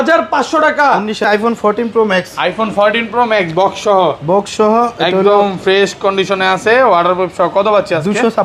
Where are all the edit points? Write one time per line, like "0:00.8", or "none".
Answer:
0:01.3